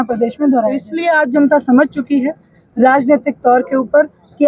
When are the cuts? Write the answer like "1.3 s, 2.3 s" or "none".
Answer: 0.9 s